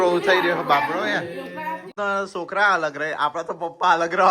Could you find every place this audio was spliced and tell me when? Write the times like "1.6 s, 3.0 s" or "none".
1.9 s